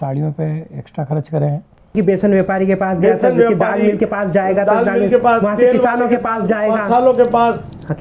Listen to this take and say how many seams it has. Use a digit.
1